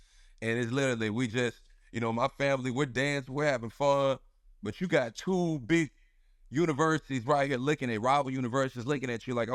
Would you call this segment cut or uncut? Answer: uncut